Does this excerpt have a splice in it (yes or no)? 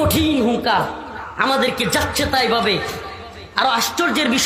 no